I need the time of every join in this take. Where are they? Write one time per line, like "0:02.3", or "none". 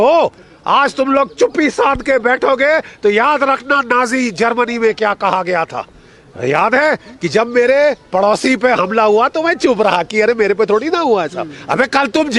none